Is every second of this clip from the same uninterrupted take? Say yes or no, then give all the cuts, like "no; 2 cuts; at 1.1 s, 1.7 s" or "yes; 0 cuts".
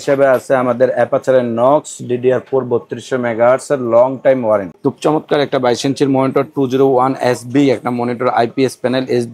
no; 1 cut; at 4.7 s